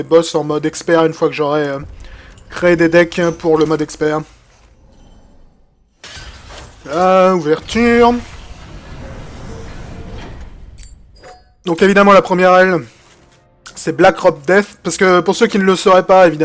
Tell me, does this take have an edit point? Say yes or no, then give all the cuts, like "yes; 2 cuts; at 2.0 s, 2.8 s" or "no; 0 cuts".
yes; 1 cut; at 12.2 s